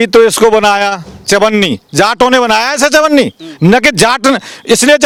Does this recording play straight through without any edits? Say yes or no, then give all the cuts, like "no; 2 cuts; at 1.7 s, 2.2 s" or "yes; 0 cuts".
yes; 0 cuts